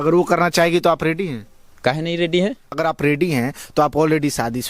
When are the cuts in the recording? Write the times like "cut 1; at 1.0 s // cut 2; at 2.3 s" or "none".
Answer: cut 1; at 2.8 s